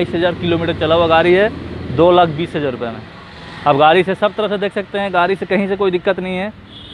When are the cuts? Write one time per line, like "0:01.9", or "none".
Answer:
none